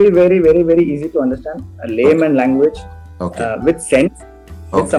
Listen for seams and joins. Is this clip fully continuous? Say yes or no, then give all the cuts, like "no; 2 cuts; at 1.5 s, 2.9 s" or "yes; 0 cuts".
yes; 0 cuts